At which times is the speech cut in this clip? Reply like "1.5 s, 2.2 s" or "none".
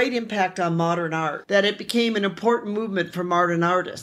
1.4 s